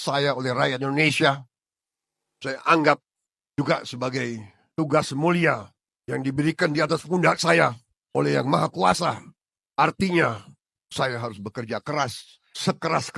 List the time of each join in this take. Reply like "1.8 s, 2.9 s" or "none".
none